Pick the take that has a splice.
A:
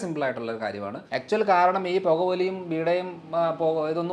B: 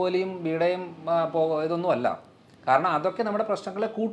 A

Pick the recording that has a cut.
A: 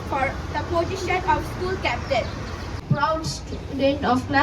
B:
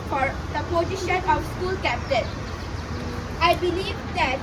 A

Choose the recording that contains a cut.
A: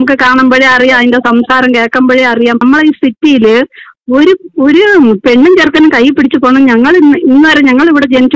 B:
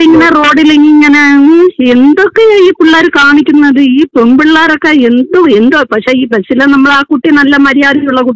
A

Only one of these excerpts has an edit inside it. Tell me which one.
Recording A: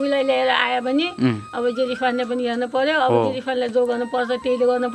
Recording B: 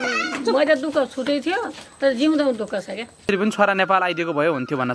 B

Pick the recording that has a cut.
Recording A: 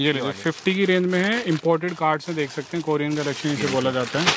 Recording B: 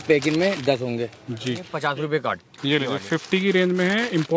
B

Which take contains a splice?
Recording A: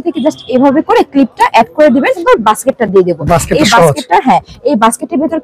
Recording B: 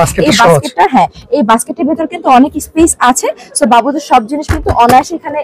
A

